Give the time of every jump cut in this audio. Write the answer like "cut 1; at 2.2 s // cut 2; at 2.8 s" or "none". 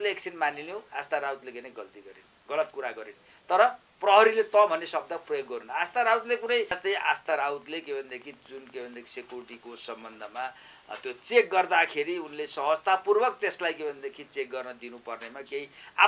cut 1; at 6.8 s

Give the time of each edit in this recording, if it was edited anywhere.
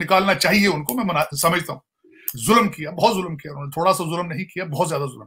cut 1; at 2.1 s

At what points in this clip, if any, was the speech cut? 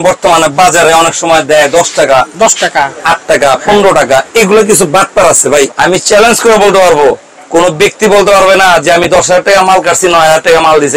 cut 1; at 5.7 s

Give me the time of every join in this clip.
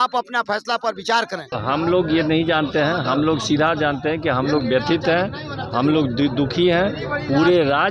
cut 1; at 1.5 s

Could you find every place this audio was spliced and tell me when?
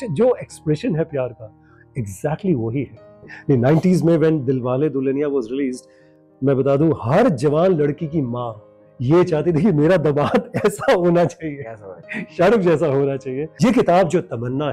cut 1; at 3.3 s // cut 2; at 13.4 s

